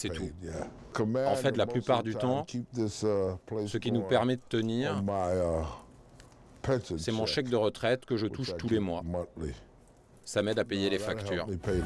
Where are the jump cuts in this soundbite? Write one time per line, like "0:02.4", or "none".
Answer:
0:00.9